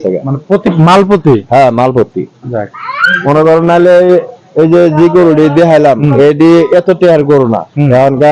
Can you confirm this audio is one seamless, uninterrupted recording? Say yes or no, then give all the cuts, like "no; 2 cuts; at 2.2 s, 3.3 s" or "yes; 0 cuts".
yes; 0 cuts